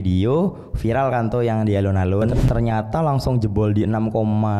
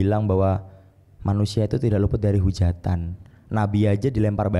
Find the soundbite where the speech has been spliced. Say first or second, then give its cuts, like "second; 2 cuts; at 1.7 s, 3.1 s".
first; 1 cut; at 2.4 s